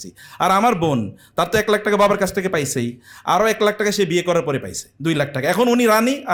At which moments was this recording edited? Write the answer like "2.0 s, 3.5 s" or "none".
none